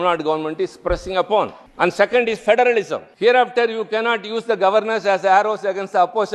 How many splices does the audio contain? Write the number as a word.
two